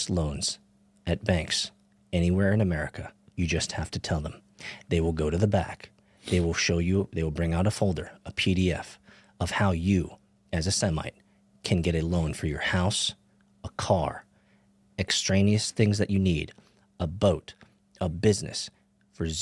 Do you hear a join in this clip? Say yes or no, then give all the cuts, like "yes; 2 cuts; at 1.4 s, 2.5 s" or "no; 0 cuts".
no; 0 cuts